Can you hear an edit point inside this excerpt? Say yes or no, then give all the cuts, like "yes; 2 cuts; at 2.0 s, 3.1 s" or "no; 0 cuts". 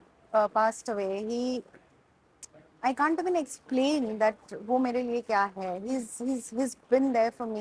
no; 0 cuts